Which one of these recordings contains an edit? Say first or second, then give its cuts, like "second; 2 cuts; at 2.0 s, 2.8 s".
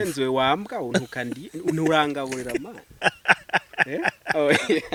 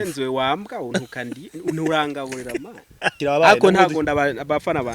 second; 1 cut; at 3.2 s